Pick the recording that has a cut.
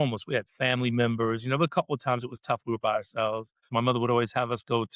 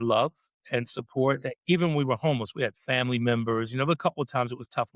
first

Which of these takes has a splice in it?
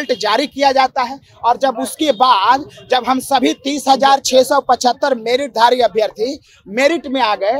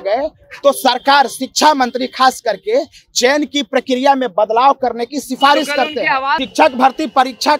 second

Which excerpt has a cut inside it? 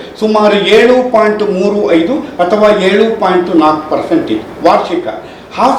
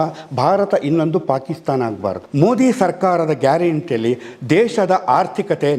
second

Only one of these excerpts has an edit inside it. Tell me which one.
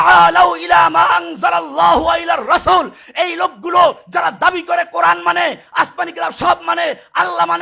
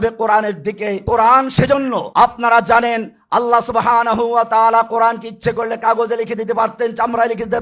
second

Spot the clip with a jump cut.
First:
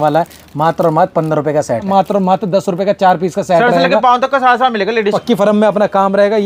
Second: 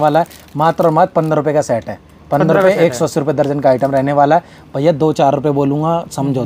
first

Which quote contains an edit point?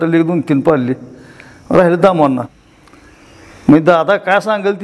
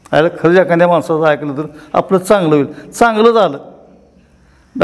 first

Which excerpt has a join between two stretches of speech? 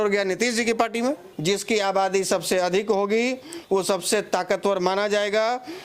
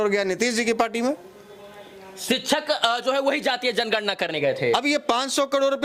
first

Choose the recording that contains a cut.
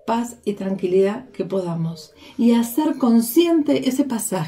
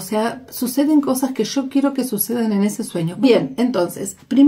second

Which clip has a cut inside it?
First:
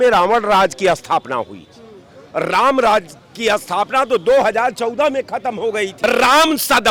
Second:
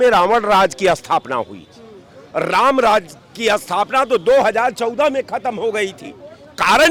first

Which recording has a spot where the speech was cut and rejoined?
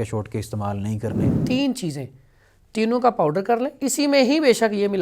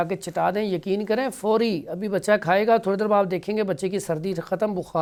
first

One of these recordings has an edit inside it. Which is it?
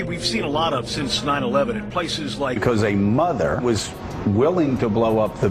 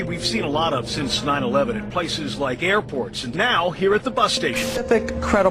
second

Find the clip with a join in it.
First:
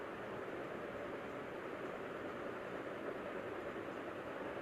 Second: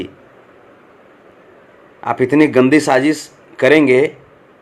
second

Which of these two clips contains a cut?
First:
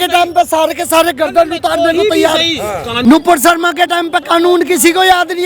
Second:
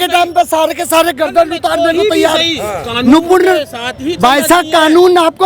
first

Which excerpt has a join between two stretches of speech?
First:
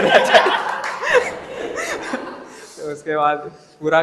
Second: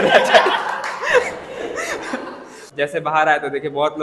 second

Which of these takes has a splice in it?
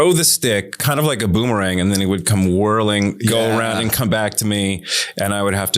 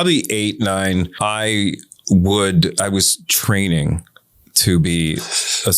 second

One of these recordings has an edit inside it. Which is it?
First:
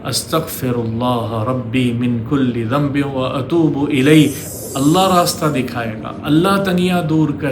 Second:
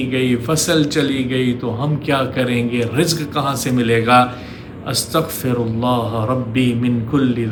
first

